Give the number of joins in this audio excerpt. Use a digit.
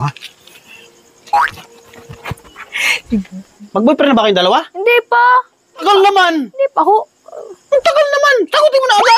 2